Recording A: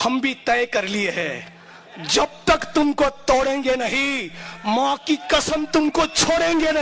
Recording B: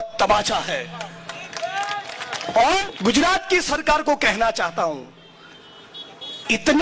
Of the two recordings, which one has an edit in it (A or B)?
B